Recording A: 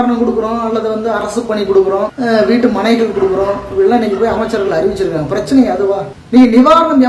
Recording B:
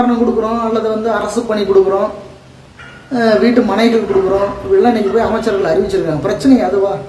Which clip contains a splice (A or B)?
A